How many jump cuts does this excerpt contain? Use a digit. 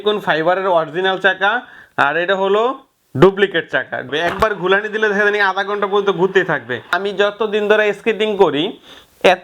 2